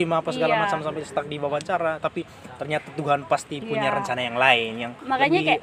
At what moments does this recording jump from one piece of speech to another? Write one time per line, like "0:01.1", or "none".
none